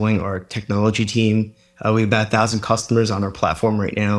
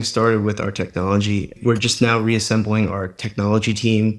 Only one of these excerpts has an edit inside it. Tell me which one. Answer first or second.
second